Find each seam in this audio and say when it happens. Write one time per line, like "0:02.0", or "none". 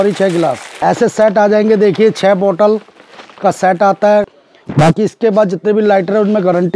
0:00.8
0:04.3